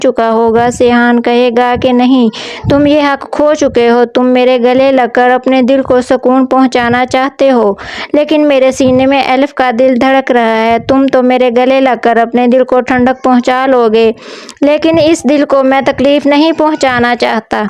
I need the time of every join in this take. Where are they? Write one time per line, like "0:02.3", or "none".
none